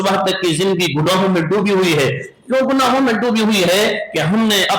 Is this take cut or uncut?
uncut